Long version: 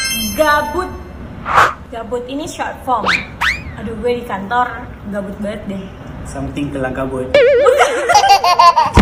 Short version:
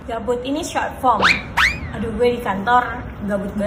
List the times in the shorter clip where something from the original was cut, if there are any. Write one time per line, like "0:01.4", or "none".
none